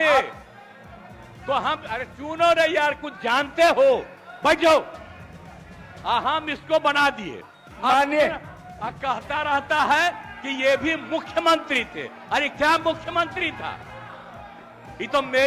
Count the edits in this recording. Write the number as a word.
one